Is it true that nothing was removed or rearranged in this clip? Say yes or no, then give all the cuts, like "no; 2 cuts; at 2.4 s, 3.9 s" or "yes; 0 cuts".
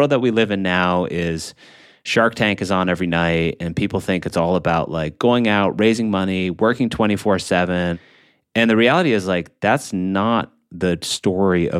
no; 1 cut; at 8.0 s